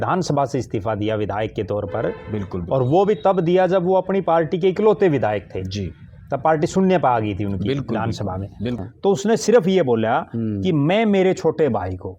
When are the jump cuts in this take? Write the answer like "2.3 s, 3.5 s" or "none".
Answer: 8.8 s